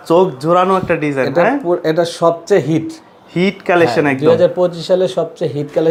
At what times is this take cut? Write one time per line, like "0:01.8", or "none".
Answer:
none